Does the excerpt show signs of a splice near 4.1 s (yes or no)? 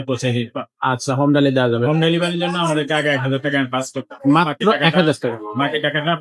no